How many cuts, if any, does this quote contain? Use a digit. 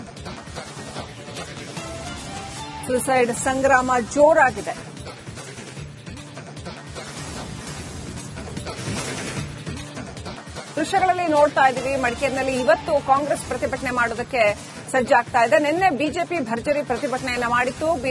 1